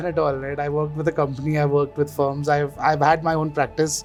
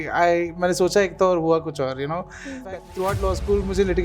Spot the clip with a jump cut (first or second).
second